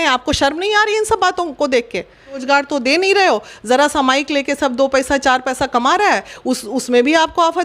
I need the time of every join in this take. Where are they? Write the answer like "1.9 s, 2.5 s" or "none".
2.4 s